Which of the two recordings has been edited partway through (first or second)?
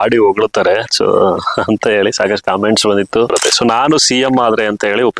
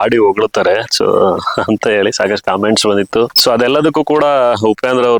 first